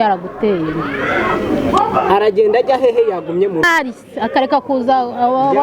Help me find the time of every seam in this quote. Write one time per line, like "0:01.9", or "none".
0:03.7